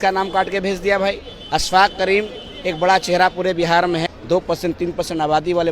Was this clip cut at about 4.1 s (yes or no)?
yes